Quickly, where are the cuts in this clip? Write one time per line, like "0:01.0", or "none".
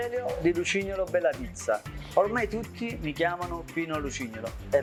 none